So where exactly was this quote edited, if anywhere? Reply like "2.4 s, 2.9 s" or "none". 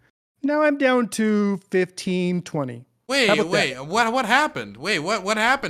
none

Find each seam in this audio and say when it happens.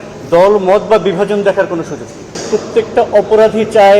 2.4 s

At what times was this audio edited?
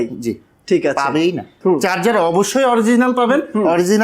1.5 s

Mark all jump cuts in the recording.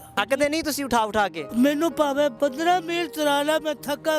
1.4 s, 2.4 s

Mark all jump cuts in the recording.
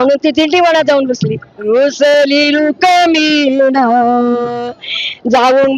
1.5 s

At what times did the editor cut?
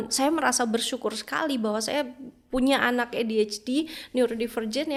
none

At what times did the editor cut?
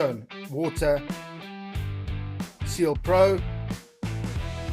3.4 s

